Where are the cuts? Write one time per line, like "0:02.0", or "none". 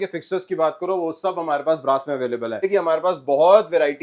0:02.6